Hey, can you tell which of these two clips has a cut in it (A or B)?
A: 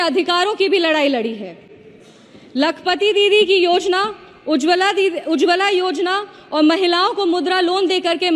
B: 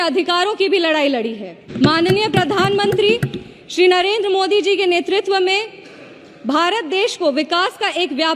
B